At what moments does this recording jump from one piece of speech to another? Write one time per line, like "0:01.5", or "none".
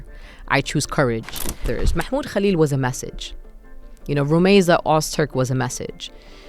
0:01.7

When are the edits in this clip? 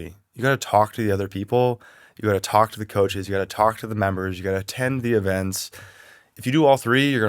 0:06.4

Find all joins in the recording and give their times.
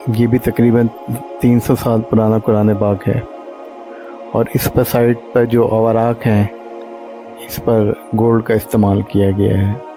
none

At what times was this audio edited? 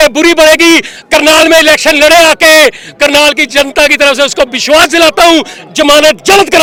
none

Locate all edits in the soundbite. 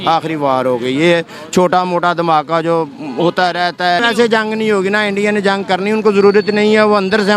0:04.0

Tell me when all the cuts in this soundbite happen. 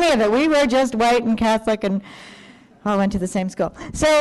0:03.3

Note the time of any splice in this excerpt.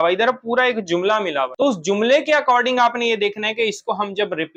none

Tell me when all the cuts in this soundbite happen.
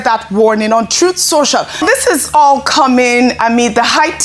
0:01.8

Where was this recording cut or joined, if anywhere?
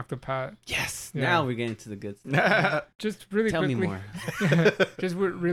0:02.9

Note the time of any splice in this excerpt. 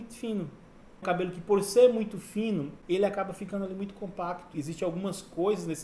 0:01.0
0:02.7
0:04.5

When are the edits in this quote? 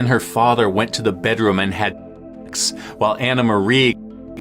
none

